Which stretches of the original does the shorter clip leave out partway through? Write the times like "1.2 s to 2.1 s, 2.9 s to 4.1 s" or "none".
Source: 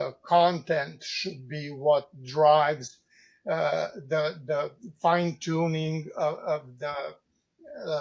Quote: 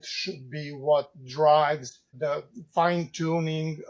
3.1 s to 4.4 s